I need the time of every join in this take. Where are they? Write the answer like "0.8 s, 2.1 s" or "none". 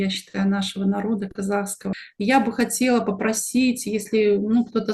1.8 s